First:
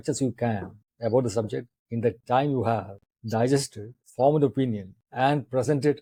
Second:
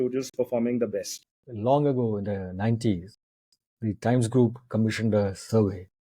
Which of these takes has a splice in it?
second; 1 cut; at 1.3 s

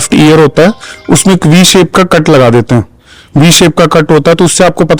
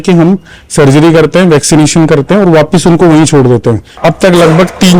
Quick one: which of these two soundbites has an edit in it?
second; 1 cut; at 3.9 s

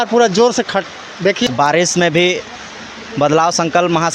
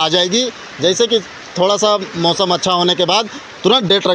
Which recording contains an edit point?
first; 1 cut; at 1.4 s

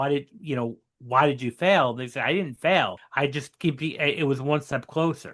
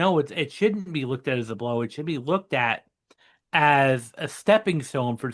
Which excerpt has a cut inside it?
first; 1 cut; at 3.0 s

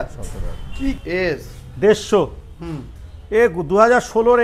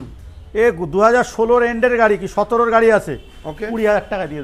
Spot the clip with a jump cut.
first; 1 cut; at 1.0 s

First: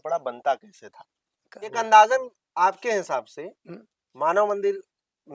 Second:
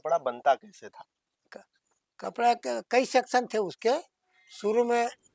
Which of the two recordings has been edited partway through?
first; 1 cut; at 1.7 s

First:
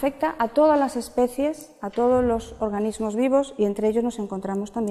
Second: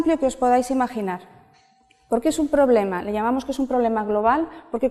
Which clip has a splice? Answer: first; 1 cut; at 2.1 s

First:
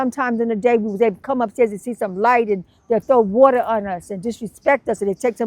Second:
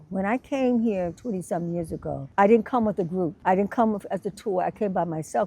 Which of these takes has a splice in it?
second; 2 cuts; at 2.2 s, 3.4 s

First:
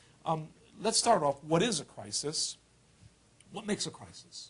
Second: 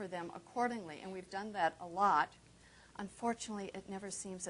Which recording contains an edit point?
first; 1 cut; at 1.6 s

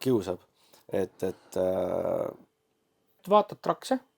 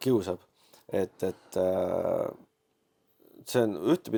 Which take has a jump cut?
first; 1 cut; at 3.2 s

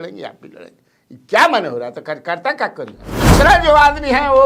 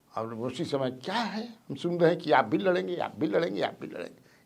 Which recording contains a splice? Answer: first; 1 cut; at 3.3 s

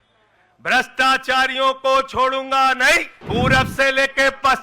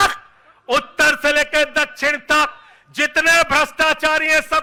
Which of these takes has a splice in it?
first; 1 cut; at 3.1 s

